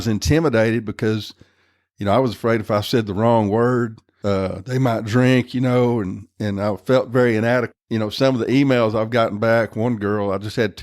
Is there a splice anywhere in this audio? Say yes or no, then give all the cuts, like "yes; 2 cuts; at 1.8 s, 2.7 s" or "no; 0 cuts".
yes; 2 cuts; at 4.1 s, 7.7 s